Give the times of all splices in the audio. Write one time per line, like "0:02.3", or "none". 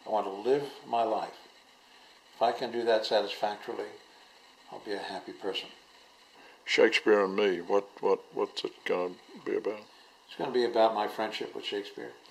none